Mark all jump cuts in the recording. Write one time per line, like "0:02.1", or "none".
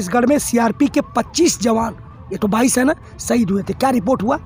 none